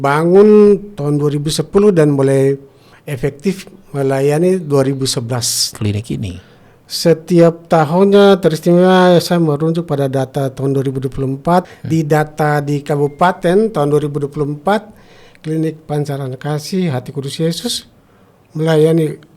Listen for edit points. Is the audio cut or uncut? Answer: cut